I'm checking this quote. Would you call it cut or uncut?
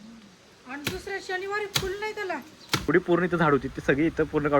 cut